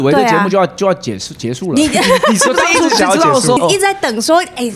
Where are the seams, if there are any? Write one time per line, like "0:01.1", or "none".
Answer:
0:03.6